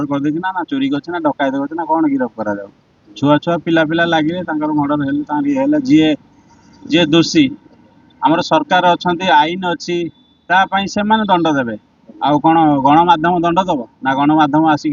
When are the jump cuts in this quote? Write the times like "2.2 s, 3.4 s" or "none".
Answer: none